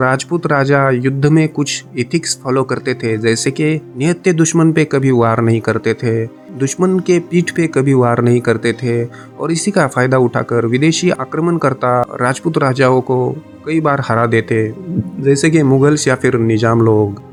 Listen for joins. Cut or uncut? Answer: uncut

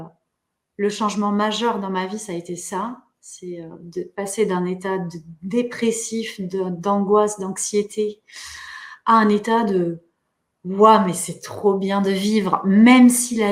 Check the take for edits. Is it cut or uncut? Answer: uncut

